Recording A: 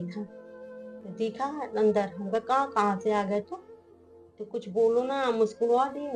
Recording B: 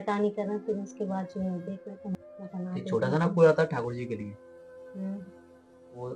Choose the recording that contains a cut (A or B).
B